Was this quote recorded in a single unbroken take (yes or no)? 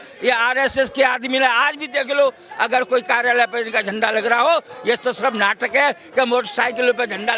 yes